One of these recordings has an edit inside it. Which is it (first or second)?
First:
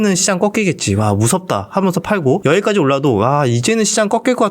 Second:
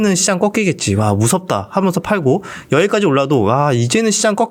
first